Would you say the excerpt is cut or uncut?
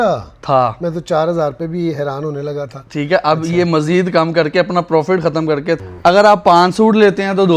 cut